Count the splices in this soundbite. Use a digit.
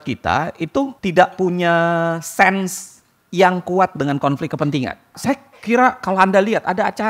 2